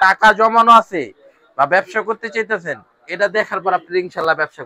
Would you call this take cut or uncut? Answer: uncut